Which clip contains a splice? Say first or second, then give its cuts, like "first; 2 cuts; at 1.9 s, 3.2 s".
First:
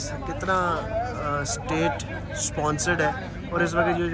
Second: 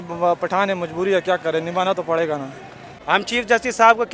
second; 1 cut; at 2.9 s